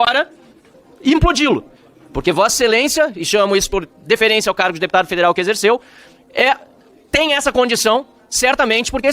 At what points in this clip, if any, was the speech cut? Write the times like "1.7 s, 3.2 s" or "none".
none